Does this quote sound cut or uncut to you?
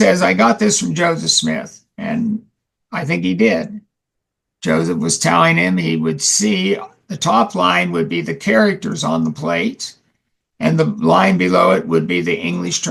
uncut